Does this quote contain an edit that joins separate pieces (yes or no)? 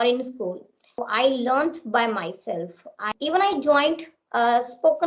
yes